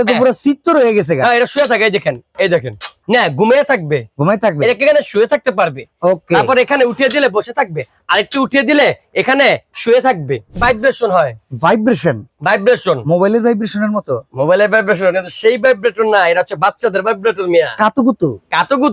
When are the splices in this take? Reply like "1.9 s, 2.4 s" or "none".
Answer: 3.0 s, 10.6 s

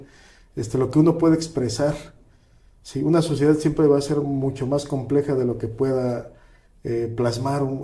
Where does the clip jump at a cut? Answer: none

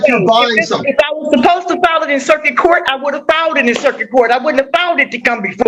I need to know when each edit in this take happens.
none

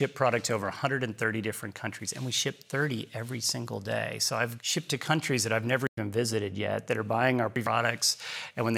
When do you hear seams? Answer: 4.6 s

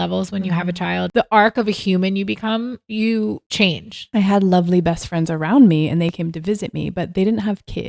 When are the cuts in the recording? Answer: 1.1 s, 2.9 s, 4.0 s

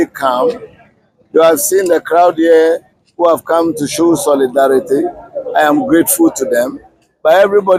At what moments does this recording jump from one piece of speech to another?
none

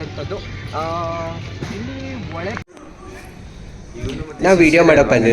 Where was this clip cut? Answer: 2.6 s

